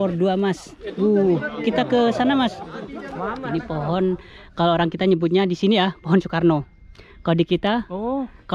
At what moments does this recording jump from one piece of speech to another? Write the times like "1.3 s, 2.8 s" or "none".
3.4 s